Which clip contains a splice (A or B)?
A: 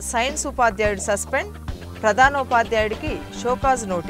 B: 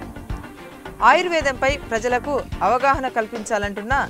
B